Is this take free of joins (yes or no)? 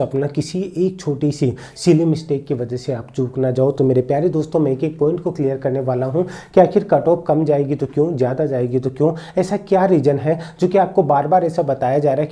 yes